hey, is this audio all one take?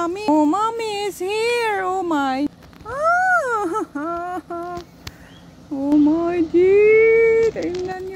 no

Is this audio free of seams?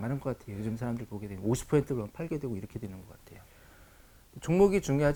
yes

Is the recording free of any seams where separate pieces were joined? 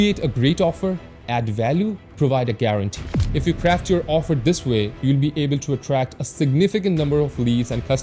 yes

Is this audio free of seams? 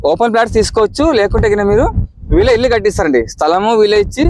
yes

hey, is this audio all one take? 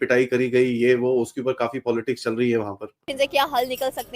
no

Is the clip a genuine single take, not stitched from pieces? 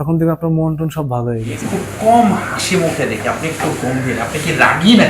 no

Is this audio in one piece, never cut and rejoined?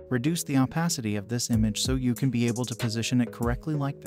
yes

